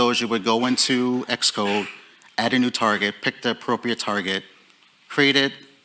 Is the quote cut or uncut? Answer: uncut